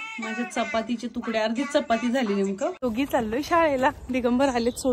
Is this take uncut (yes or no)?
no